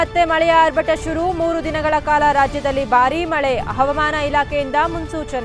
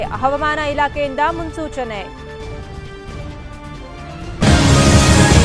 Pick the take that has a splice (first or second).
second